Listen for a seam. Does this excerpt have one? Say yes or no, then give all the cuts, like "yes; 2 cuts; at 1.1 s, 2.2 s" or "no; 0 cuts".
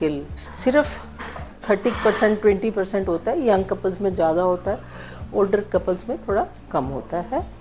no; 0 cuts